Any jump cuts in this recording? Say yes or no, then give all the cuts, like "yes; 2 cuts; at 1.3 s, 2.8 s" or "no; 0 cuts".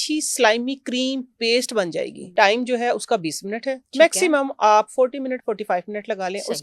yes; 1 cut; at 2.2 s